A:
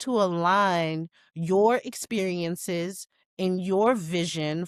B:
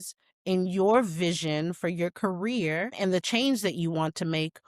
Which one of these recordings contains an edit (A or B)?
B